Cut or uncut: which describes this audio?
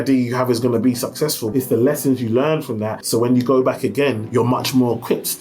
cut